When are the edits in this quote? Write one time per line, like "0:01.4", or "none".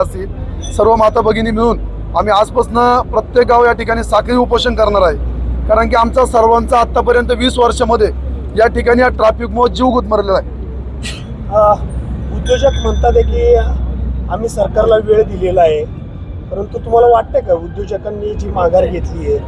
none